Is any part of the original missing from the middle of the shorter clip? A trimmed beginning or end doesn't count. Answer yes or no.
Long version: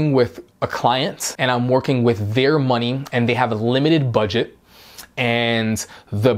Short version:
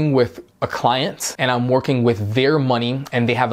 no